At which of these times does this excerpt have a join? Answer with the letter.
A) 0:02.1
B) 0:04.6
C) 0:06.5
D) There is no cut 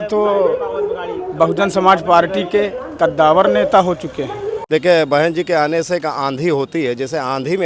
B